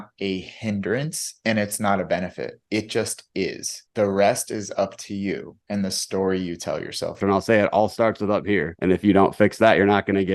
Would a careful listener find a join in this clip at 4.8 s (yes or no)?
no